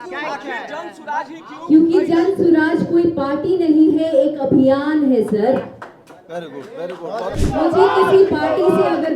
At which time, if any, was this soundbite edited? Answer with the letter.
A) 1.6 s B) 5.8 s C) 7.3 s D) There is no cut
C